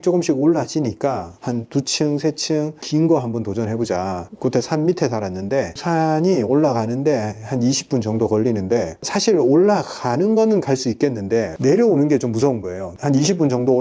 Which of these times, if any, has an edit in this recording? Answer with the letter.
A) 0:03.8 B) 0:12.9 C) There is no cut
B